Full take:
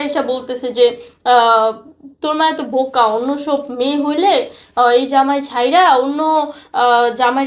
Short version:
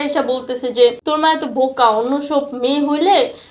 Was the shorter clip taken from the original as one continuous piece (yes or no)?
no